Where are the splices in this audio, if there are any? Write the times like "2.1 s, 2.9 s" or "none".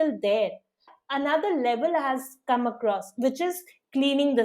0.9 s